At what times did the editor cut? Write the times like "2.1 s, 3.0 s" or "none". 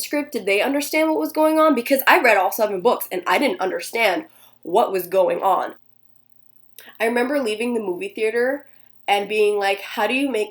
5.8 s